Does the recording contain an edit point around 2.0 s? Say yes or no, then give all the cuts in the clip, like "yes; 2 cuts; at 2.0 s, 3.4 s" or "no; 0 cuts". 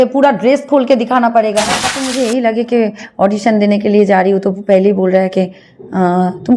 yes; 1 cut; at 2.0 s